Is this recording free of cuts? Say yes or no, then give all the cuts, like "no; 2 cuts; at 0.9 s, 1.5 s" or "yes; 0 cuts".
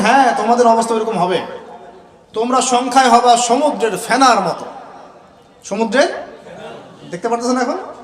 yes; 0 cuts